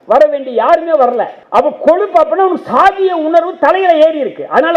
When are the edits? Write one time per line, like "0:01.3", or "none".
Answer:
0:01.4